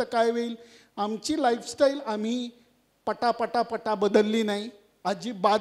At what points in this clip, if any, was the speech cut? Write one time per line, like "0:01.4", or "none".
none